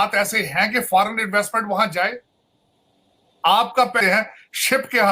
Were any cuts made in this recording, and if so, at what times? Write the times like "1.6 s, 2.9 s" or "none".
4.0 s